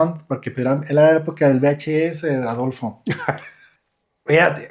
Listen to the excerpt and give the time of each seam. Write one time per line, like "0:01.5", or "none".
0:03.7